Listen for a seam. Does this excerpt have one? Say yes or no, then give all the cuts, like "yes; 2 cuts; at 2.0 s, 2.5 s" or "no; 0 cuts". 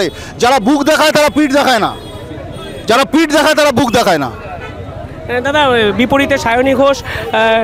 no; 0 cuts